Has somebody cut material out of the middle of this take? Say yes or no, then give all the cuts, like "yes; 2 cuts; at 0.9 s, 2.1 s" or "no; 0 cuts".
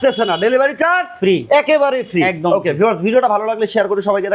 no; 0 cuts